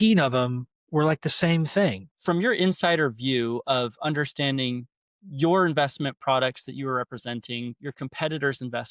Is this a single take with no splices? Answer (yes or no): no